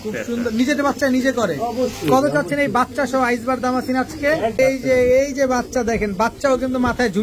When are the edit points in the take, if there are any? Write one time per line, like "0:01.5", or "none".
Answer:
0:04.6

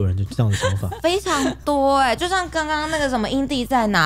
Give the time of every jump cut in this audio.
none

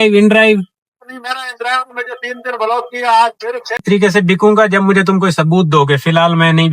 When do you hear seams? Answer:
0:03.8

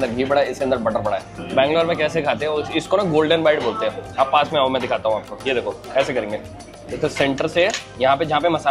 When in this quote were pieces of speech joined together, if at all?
none

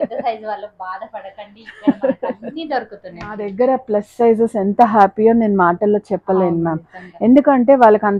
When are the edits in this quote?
0:03.4

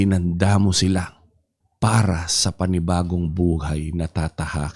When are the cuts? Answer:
none

